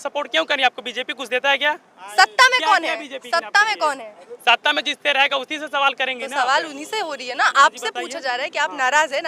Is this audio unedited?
yes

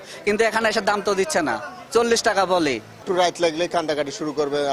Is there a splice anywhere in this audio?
yes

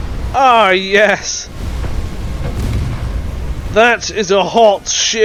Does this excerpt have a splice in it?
no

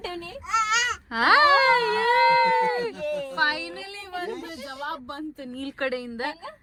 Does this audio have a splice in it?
no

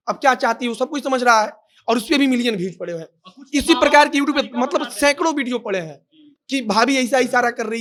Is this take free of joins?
yes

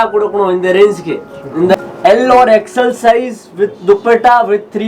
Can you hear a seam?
yes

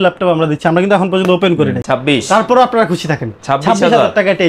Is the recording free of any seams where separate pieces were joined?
no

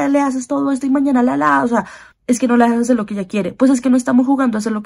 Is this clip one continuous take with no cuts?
no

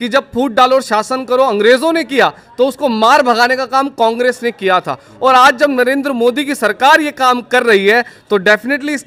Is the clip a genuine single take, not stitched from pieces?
yes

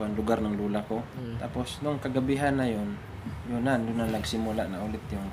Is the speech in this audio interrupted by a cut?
yes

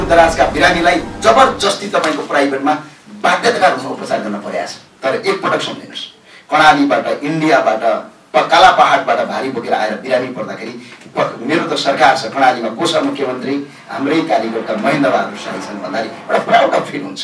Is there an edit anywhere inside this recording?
yes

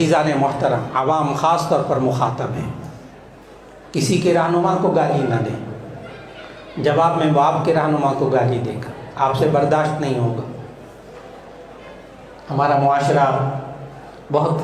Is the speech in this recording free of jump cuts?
yes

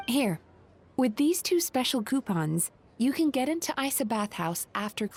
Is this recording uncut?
yes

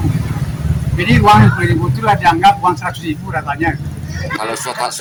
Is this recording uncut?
yes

